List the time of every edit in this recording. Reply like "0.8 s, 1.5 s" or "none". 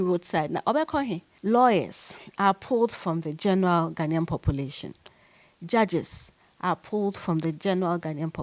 1.3 s